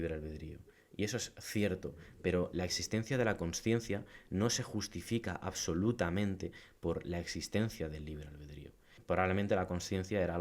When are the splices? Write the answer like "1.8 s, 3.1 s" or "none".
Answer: 9.0 s